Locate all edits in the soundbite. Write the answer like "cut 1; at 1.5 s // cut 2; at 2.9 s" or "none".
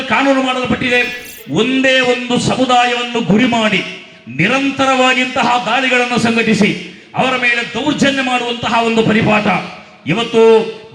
cut 1; at 1.3 s